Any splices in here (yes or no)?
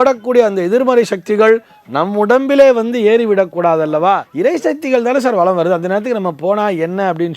yes